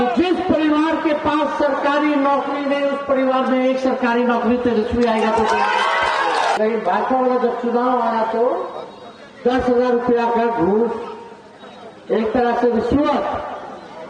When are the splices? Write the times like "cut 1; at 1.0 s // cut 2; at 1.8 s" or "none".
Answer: cut 1; at 6.6 s